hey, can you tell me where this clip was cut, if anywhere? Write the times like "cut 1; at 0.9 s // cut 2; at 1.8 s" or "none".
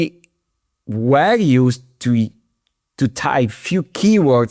none